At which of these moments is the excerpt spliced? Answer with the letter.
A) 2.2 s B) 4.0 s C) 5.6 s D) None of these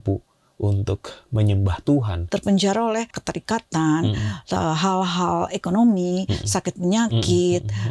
A